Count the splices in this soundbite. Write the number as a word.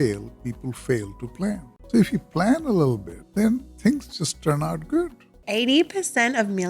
three